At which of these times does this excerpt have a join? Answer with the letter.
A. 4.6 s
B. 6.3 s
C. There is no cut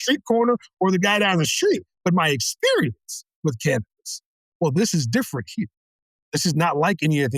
C